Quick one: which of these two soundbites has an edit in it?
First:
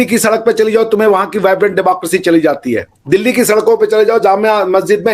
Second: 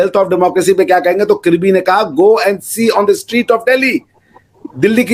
first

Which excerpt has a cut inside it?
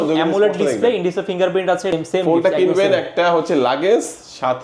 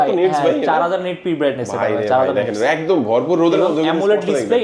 first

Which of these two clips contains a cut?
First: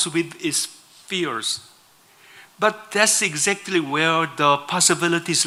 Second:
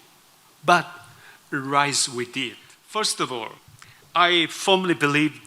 second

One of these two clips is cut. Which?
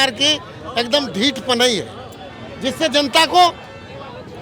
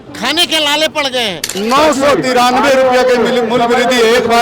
second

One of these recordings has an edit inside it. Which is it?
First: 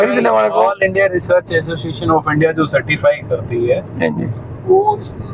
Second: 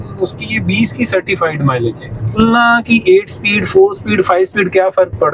second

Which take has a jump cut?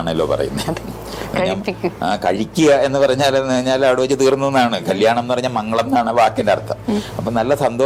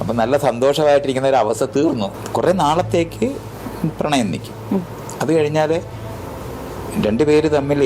second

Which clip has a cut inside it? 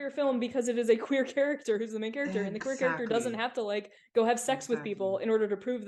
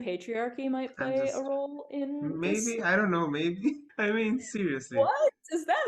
second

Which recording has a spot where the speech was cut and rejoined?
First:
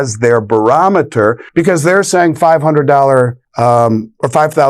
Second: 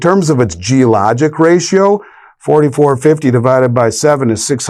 first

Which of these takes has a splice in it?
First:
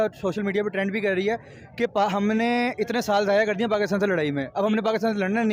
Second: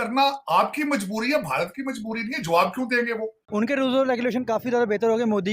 second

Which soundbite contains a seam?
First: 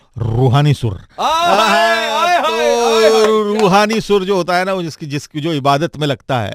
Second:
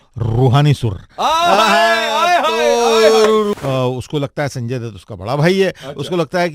second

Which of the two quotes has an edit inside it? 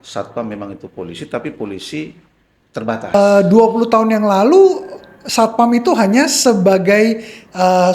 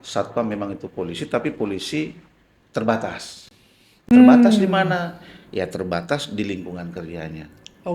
first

